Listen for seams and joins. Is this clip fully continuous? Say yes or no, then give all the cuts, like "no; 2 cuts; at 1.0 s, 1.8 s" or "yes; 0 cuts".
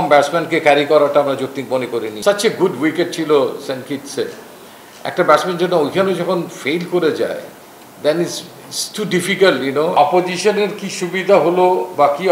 no; 2 cuts; at 2.1 s, 9.9 s